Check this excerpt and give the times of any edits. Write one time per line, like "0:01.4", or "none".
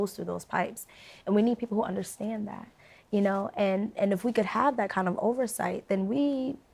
none